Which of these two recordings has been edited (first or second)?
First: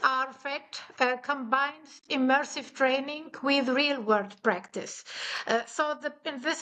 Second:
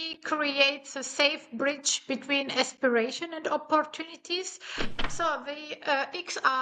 second